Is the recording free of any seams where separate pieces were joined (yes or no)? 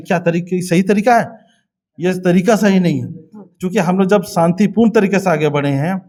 yes